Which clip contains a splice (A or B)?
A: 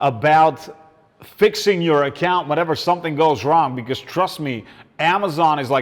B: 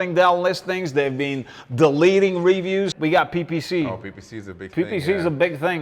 B